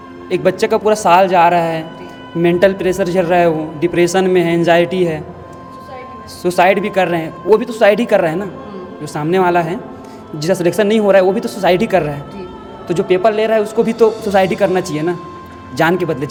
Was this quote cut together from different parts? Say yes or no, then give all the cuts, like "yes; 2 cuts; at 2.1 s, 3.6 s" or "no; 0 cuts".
no; 0 cuts